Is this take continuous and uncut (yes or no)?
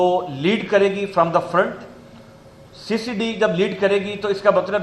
yes